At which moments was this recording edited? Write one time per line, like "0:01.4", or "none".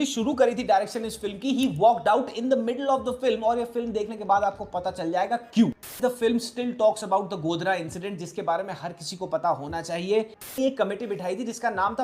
0:05.9
0:10.5

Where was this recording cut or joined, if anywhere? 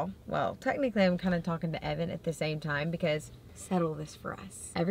none

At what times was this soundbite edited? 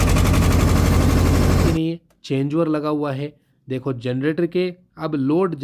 0:01.7

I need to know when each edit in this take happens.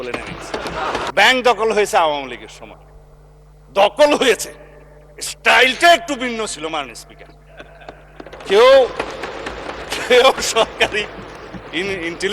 0:01.1

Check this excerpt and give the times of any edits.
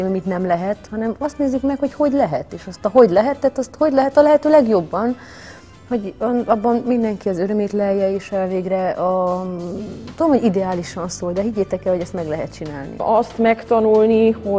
0:13.0

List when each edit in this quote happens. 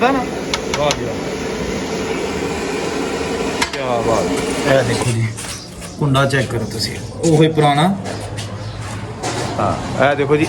0:04.6
0:09.5

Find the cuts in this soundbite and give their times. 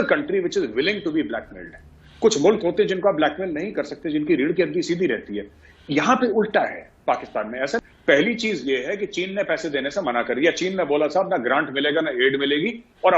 0:07.8

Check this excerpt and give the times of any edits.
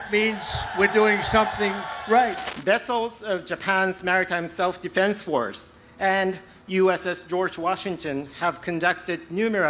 0:02.5

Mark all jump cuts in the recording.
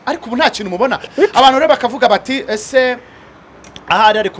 0:01.0

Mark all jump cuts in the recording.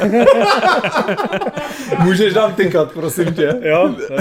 none

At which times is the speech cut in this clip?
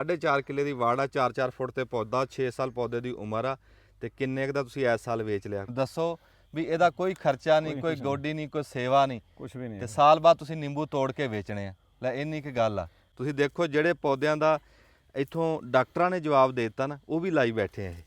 0:05.7
0:13.1

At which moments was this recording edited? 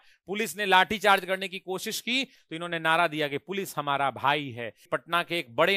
0:02.4
0:04.8

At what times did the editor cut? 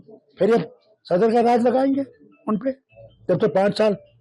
none

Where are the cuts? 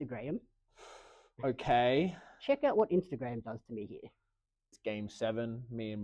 0:04.7

